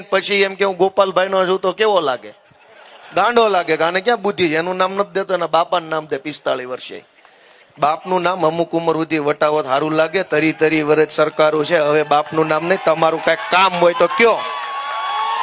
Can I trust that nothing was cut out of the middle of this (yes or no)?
yes